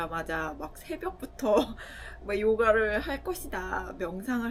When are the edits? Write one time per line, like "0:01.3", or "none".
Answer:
none